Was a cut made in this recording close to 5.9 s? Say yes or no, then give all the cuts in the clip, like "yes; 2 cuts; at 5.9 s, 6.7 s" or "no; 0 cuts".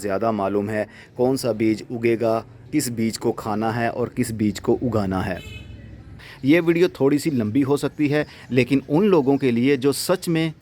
yes; 1 cut; at 5.9 s